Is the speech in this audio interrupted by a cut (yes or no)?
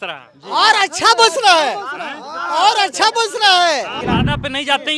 yes